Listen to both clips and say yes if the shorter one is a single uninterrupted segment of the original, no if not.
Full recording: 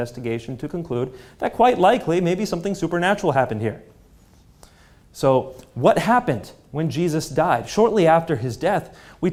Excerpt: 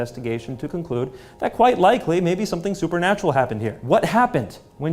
no